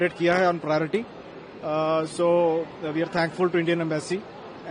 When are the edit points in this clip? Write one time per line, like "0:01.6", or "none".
none

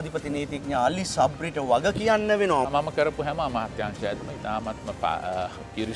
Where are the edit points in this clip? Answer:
0:02.7

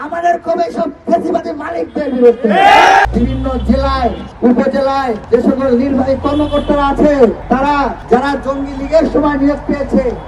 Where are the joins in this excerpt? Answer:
0:03.1
0:04.3
0:05.2
0:07.7

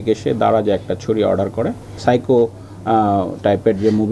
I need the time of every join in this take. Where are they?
0:01.8

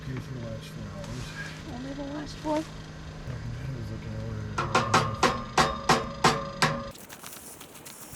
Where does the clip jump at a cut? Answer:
0:01.6
0:03.3
0:06.9

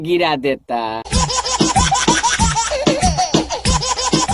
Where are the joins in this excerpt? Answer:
0:01.1
0:03.3

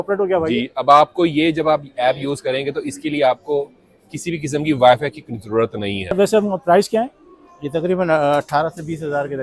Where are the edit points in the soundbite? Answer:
0:06.1

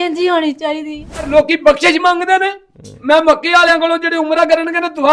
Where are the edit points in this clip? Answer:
0:01.3

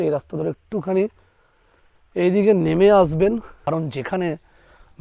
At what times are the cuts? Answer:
0:03.5

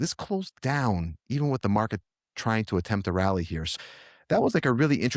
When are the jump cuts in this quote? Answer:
0:03.7

